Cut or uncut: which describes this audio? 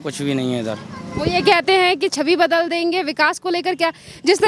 uncut